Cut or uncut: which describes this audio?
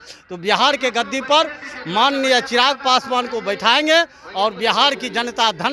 uncut